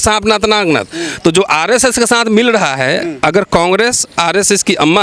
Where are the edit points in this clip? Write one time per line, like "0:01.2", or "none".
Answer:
none